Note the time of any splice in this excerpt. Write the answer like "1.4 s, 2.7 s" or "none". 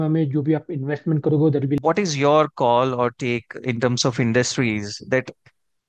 1.8 s